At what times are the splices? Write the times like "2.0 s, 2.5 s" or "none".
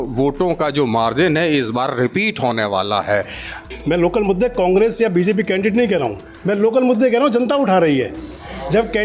3.7 s